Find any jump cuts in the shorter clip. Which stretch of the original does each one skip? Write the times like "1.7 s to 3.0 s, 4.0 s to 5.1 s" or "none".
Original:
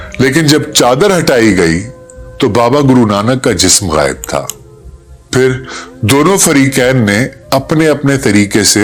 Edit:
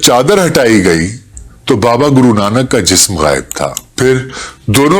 4.5 s to 5.2 s

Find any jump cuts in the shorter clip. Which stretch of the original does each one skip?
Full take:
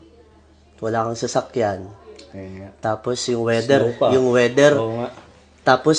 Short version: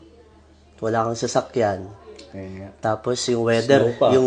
none

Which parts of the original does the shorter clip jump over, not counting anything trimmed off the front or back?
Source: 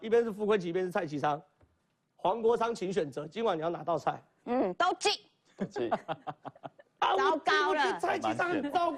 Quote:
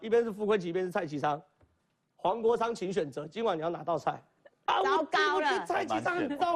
4.3 s to 6.6 s

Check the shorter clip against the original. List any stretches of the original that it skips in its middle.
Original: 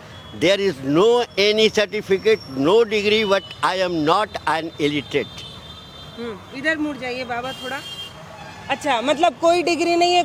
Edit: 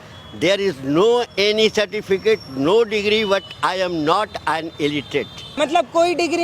5.5 s to 9.0 s

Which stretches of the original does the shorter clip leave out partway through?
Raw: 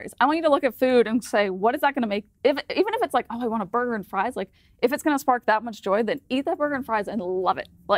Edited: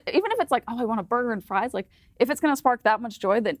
none

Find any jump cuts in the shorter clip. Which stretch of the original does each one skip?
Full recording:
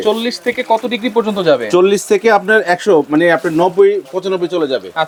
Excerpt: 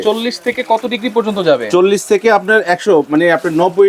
none

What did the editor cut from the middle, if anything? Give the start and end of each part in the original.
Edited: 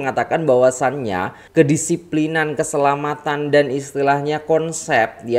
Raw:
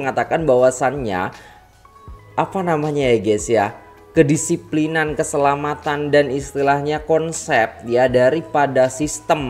1.4 s to 4.0 s

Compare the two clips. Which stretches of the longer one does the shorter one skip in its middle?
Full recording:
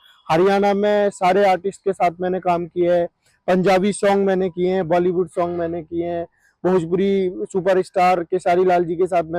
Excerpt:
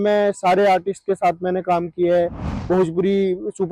3.3 s to 6.4 s

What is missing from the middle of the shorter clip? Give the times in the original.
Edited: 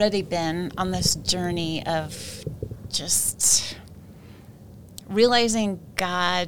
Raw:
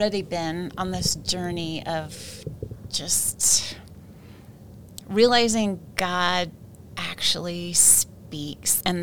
none

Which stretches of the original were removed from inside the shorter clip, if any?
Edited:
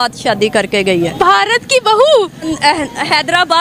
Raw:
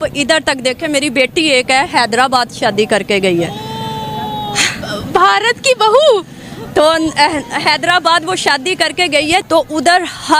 3.5 s to 5.1 s, 6.4 s to 7.0 s

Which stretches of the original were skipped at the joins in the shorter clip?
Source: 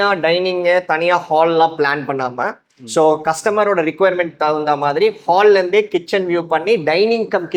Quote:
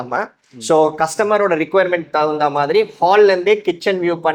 none

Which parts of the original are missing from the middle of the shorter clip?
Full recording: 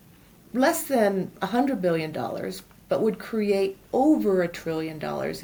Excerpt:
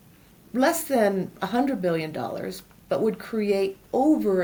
none

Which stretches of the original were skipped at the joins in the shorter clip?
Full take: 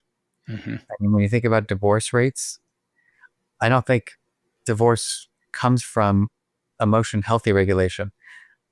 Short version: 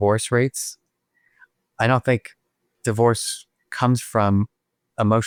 none

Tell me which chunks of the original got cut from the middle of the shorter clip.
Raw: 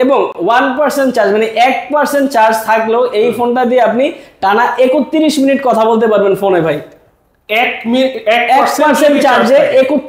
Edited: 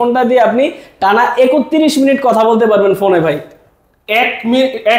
none

